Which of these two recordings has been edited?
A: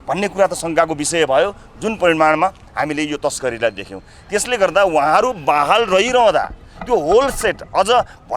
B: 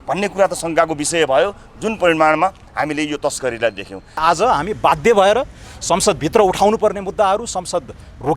B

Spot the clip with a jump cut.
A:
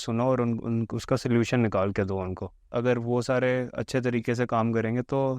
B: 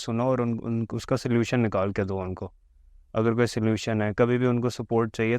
A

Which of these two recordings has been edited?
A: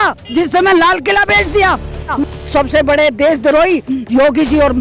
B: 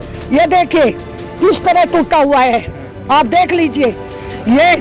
A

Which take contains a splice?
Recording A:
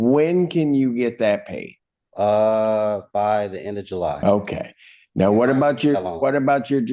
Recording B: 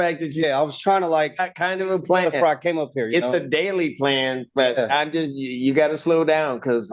A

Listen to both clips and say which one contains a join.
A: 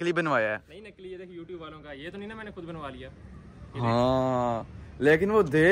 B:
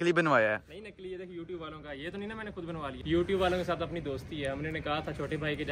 B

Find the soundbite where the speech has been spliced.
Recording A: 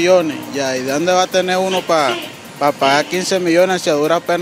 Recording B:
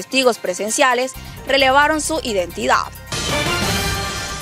B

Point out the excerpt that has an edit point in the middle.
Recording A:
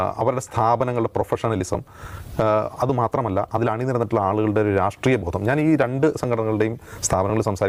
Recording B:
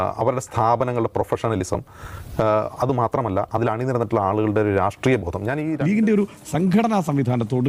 B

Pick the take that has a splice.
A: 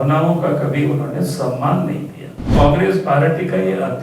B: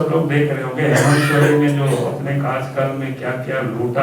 A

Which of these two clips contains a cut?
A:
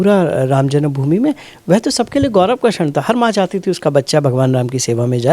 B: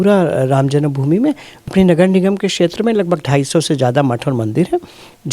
B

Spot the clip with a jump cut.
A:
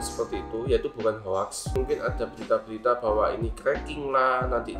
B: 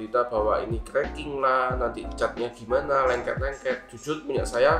A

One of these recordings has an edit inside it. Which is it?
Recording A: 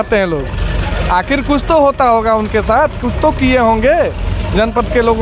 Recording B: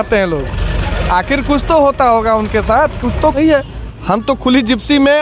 B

